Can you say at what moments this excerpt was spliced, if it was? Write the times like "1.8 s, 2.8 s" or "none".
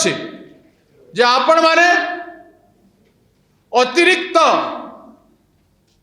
none

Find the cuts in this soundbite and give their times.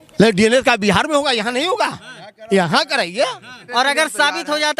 3.5 s

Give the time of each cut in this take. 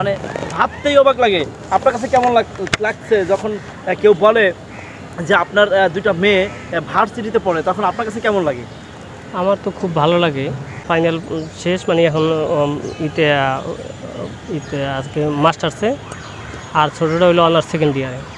10.8 s

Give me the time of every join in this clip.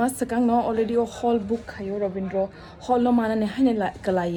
none

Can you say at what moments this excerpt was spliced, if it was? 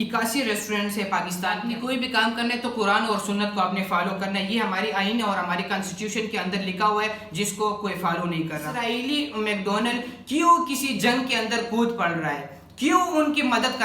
1.6 s, 8.7 s

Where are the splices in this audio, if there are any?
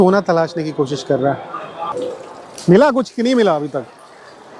1.9 s

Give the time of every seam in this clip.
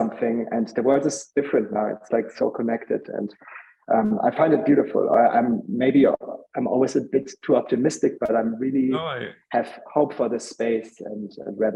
none

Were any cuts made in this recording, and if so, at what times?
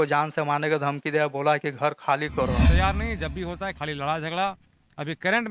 2.6 s

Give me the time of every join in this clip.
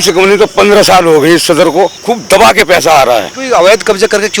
2.0 s, 3.4 s

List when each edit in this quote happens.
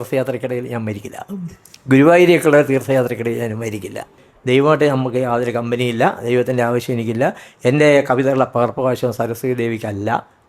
4.3 s

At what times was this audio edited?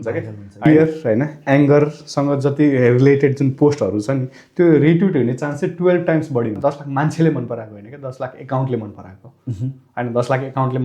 0.7 s, 6.6 s

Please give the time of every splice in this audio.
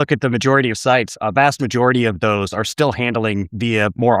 1.1 s

